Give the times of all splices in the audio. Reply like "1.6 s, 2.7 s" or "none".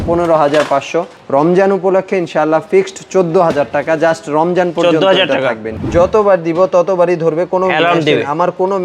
1.2 s, 5.7 s

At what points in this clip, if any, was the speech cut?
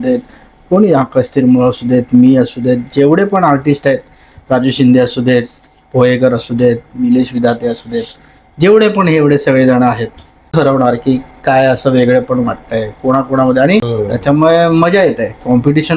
10.5 s, 13.9 s

